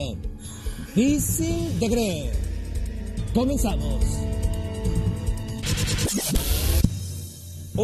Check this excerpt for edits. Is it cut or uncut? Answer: uncut